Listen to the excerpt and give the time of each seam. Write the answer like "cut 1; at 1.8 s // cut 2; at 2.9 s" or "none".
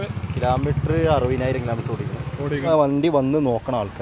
cut 1; at 2.7 s